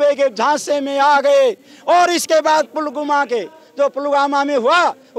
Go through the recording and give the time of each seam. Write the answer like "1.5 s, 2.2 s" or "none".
none